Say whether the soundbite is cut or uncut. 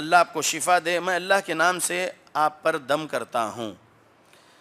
uncut